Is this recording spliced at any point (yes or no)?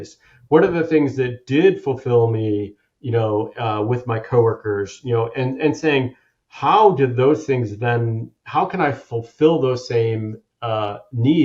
no